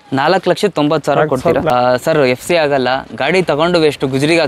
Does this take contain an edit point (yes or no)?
yes